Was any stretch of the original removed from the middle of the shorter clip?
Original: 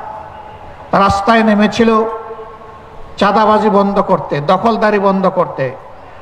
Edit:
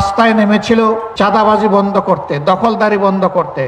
yes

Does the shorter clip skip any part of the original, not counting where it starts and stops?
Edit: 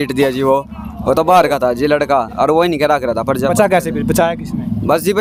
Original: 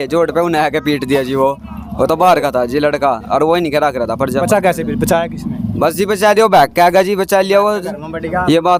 no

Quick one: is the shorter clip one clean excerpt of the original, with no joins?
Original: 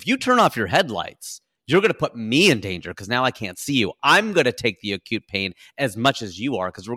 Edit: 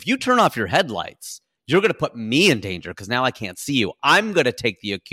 yes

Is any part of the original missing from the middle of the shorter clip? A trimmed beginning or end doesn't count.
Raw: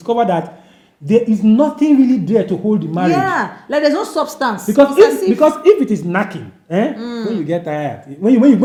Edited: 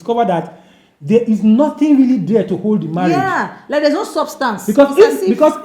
no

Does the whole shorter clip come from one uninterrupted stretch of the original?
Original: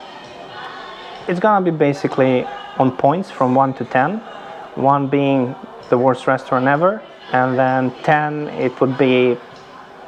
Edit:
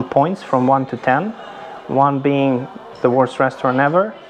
yes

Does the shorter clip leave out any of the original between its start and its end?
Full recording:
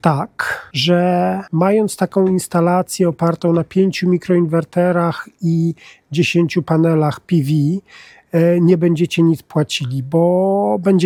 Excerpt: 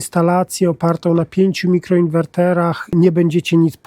yes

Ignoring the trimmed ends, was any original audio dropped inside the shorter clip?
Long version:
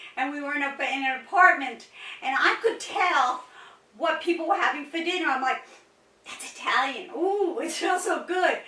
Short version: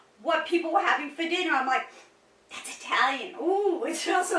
no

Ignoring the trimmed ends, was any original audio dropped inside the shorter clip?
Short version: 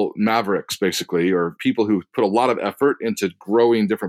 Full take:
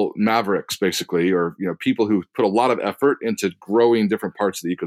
yes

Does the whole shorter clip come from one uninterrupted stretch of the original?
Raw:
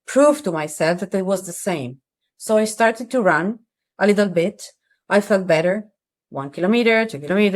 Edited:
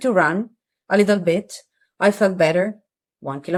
yes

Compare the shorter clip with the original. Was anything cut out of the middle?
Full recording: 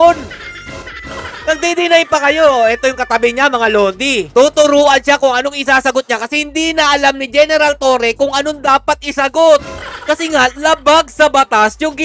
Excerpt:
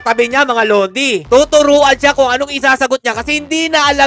no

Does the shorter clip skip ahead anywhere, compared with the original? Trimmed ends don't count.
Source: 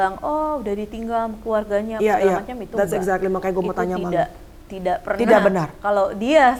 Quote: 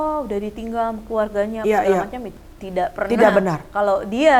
yes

